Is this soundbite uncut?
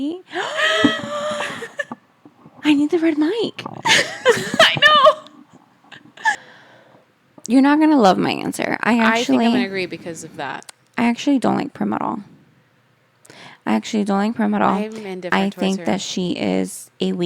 no; 1 cut; at 6.4 s

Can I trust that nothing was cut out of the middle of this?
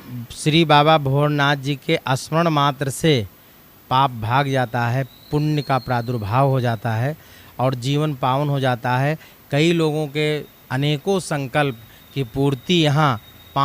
yes; 0 cuts

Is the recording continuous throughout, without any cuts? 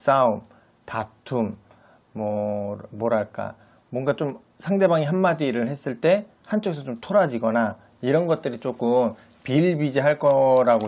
yes; 0 cuts

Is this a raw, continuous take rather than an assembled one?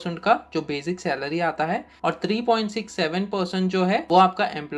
no; 2 cuts; at 1.9 s, 4.0 s

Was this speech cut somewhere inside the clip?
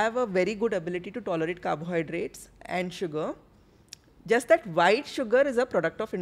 no; 0 cuts

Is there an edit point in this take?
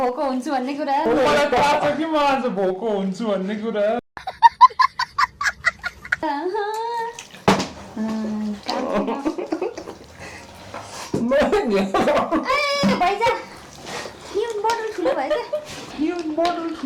no; 0 cuts

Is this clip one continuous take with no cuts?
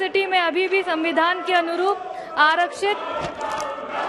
yes; 0 cuts

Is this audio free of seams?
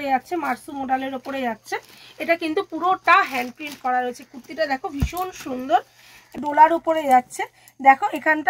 no; 1 cut; at 6.3 s

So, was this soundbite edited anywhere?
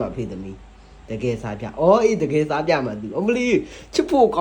no; 0 cuts

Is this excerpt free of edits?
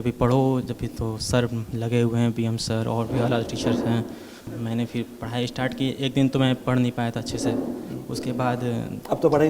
no; 1 cut; at 4.4 s

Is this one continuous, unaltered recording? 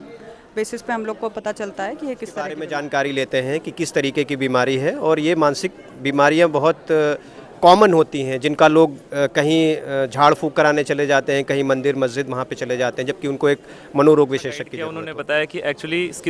no; 2 cuts; at 2.6 s, 14.8 s

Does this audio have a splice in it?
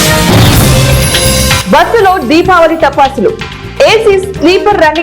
no; 0 cuts

